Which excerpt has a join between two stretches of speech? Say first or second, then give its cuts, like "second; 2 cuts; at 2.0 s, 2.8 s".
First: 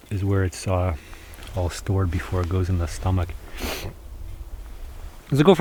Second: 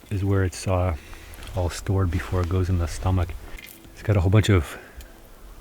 second; 1 cut; at 3.4 s